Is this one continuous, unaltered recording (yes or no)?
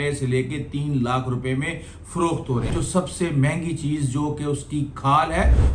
no